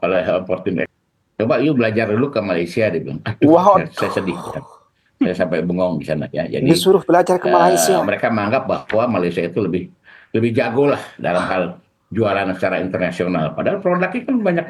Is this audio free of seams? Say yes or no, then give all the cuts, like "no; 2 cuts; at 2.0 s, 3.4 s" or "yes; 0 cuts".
no; 1 cut; at 0.9 s